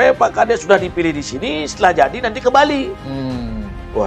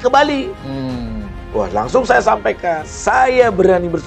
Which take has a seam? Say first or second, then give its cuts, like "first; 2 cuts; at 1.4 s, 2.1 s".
second; 1 cut; at 2.9 s